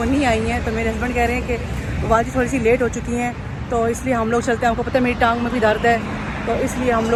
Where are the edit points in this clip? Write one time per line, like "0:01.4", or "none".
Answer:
none